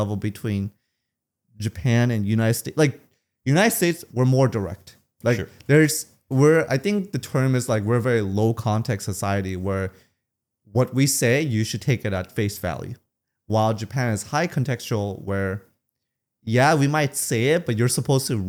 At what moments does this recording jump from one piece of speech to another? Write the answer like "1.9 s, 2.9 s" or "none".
none